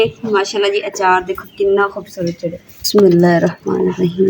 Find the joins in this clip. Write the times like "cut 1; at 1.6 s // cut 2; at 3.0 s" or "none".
cut 1; at 2.8 s